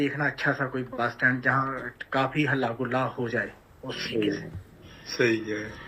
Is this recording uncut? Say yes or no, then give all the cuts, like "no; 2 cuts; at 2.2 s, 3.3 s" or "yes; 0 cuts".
yes; 0 cuts